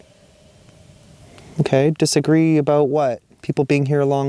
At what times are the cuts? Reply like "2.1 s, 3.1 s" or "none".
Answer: 3.3 s